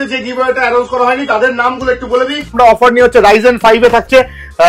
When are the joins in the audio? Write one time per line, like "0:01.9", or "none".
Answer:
0:02.5